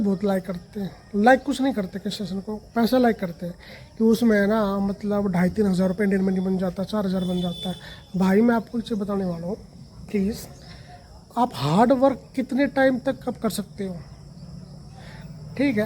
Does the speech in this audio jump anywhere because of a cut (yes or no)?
no